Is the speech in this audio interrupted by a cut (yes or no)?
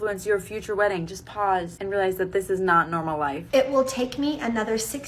yes